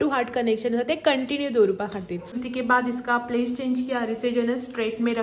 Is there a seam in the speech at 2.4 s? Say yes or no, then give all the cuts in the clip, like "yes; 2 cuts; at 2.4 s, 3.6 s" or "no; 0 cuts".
yes; 1 cut; at 2.4 s